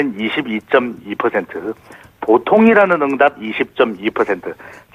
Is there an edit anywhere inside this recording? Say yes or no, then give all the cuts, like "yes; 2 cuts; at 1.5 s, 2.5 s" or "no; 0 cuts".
yes; 1 cut; at 1.0 s